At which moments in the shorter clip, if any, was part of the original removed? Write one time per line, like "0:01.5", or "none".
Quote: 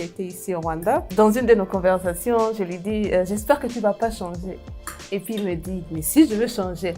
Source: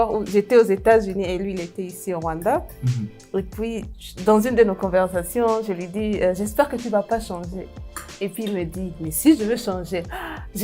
0:01.1

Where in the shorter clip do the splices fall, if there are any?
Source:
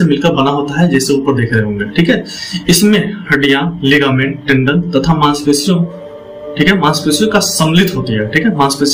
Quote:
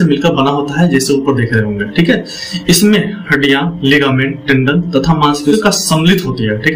0:05.5

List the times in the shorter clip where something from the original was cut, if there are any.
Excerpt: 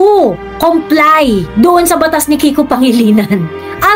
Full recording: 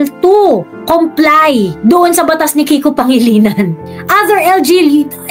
none

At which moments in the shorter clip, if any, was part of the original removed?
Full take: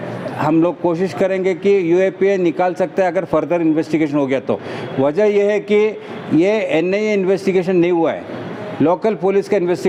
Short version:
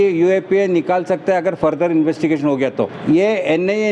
0:02.9

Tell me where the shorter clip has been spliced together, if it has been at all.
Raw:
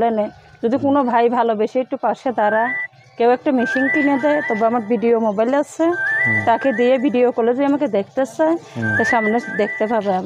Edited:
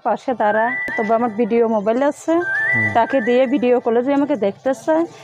0:01.0

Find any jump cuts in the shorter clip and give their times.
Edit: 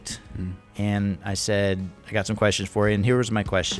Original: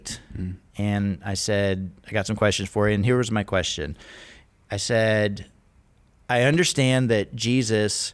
none

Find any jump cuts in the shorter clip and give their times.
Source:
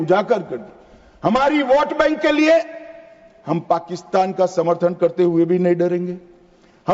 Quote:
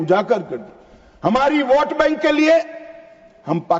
none

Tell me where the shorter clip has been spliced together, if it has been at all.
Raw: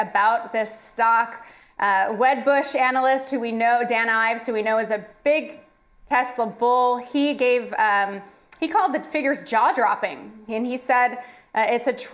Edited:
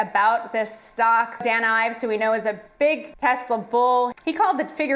0:01.4
0:03.1
0:04.2

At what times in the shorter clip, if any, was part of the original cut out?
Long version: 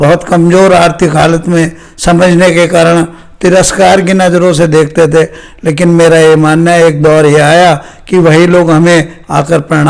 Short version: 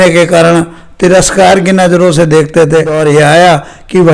0:02.9

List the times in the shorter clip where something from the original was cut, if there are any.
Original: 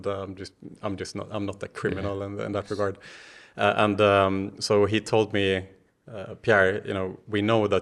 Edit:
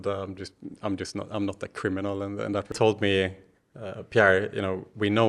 0:02.7

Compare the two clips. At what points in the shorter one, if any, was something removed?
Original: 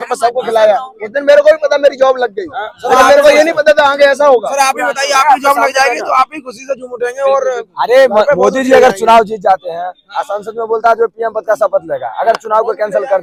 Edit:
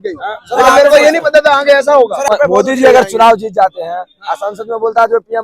0:02.3

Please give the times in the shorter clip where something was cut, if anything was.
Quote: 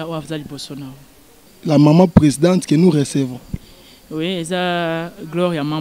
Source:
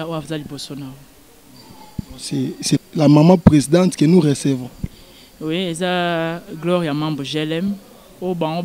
0:01.6

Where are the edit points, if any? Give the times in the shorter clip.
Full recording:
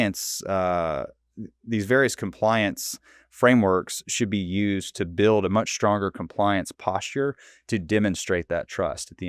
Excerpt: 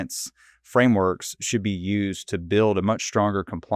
none

